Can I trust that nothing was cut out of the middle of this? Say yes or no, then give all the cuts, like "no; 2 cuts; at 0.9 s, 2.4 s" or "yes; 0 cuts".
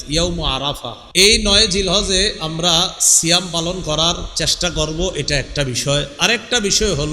no; 1 cut; at 1.0 s